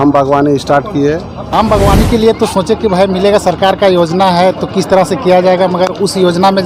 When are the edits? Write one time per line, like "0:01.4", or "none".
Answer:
0:01.4

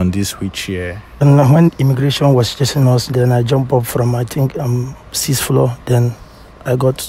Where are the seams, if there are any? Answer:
0:01.2

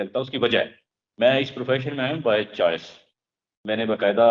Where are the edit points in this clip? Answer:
none

